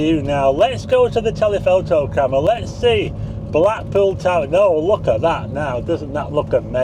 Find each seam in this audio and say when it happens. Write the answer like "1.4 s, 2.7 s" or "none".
none